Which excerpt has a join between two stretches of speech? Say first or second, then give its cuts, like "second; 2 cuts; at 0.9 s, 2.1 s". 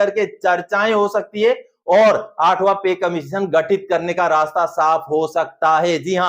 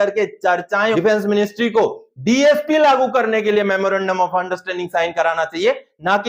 second; 1 cut; at 0.9 s